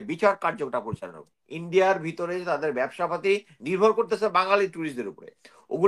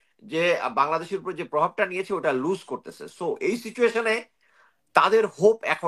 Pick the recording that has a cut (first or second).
first